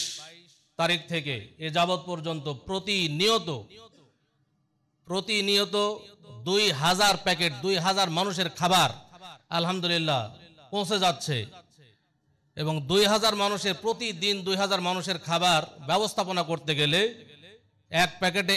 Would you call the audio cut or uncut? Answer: uncut